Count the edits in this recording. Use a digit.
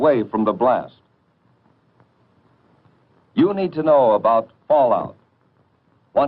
1